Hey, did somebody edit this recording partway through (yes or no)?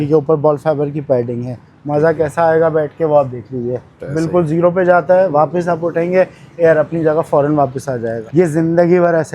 yes